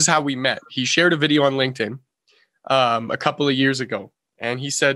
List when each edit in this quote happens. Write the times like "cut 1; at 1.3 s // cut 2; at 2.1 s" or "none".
none